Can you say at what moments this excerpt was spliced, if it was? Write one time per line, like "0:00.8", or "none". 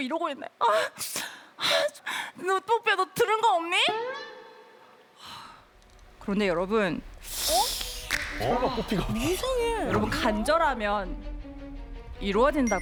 none